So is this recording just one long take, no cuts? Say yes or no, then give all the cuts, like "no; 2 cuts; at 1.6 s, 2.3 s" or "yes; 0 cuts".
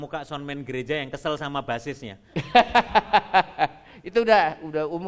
yes; 0 cuts